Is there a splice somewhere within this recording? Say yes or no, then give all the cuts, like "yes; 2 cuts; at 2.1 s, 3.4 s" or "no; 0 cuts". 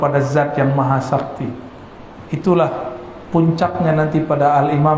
no; 0 cuts